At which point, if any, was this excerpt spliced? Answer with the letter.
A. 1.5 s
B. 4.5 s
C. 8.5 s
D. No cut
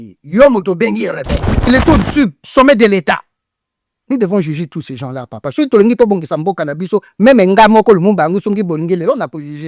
A